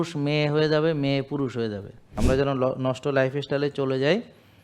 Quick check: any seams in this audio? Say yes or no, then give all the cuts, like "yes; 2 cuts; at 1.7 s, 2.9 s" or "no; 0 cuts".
yes; 1 cut; at 2.2 s